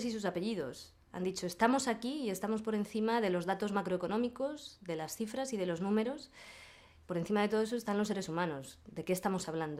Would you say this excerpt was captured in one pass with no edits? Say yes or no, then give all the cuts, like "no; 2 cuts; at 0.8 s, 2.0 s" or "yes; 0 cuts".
no; 1 cut; at 1.4 s